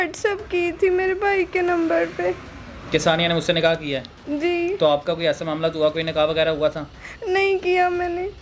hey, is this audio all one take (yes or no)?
yes